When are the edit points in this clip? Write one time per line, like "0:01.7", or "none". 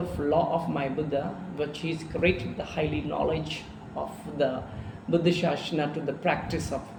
none